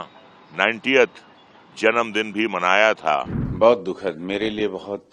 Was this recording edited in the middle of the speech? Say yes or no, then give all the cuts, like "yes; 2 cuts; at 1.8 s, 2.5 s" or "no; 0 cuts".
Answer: yes; 1 cut; at 3.4 s